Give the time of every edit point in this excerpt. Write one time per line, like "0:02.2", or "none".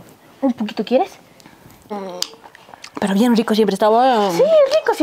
none